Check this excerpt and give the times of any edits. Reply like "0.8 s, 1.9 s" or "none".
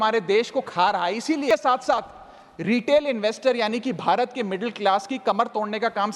1.5 s